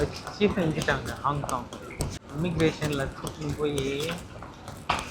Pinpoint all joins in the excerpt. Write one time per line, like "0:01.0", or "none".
0:02.2